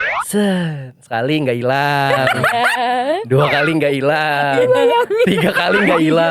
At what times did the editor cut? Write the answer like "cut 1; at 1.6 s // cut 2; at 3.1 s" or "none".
none

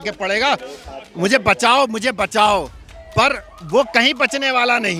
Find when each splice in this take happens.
none

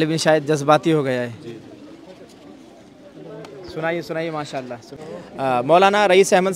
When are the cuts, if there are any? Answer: cut 1; at 5.3 s

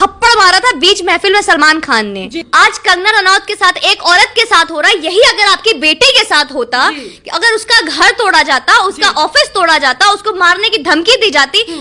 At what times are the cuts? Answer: cut 1; at 2.4 s

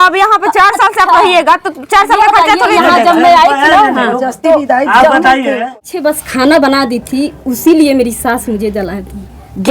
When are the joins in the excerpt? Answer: cut 1; at 5.7 s

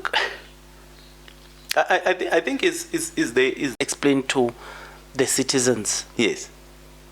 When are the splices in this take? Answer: cut 1; at 3.7 s

